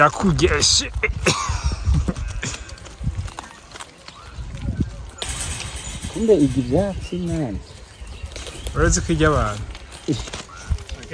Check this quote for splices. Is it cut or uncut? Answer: uncut